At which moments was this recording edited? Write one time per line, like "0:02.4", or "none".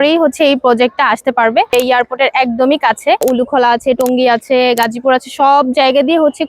0:01.7
0:03.2